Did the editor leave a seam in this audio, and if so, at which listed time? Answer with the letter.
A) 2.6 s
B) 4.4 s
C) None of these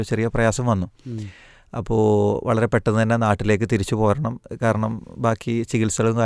C